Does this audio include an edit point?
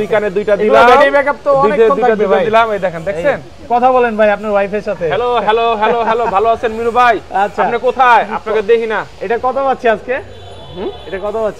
no; 0 cuts

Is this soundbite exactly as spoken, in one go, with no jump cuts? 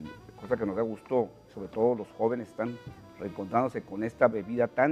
no; 1 cut; at 1.6 s

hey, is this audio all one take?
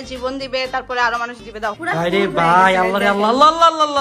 no; 1 cut; at 1.8 s

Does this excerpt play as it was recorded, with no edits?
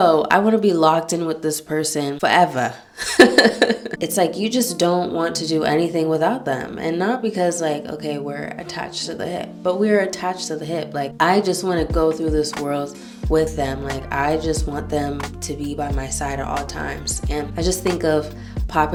yes; 0 cuts

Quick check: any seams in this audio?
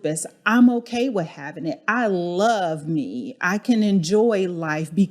yes; 1 cut; at 3.6 s

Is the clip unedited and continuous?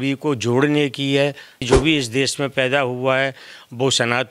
no; 1 cut; at 1.6 s

